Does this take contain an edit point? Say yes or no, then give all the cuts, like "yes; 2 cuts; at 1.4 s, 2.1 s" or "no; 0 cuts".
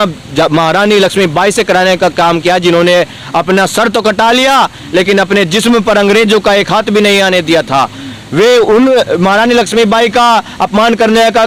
no; 0 cuts